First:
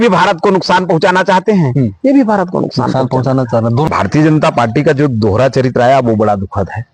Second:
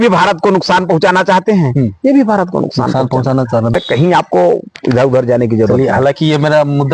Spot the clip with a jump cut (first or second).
first